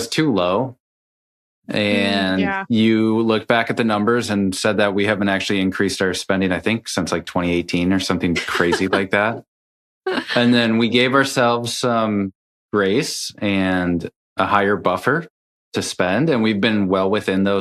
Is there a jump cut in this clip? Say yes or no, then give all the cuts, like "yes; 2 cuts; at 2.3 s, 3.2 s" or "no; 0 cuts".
no; 0 cuts